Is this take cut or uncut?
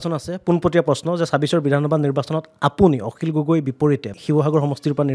cut